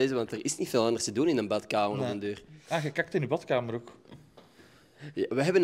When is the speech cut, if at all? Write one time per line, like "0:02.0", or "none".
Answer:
none